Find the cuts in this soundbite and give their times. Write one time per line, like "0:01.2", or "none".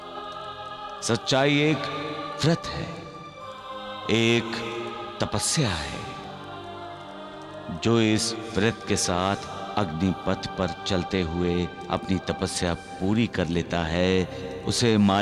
none